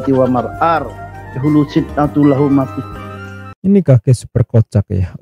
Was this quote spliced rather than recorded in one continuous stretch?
no; 0 cuts

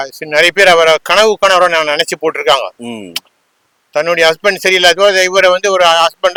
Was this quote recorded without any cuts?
yes; 0 cuts

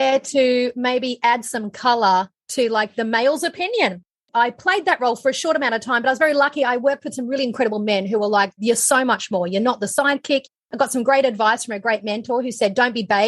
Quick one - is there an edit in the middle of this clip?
yes; 1 cut; at 4.2 s

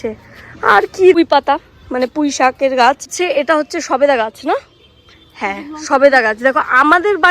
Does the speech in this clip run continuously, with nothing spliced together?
no; 2 cuts; at 1.2 s, 3.1 s

